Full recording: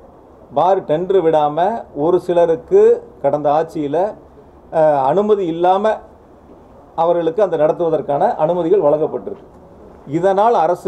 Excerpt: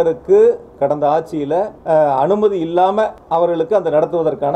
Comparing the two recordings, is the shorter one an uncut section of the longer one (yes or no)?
no